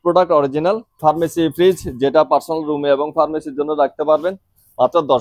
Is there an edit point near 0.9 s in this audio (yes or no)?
yes